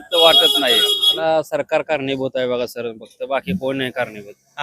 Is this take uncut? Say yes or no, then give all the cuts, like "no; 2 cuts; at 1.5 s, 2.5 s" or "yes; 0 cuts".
no; 1 cut; at 1.2 s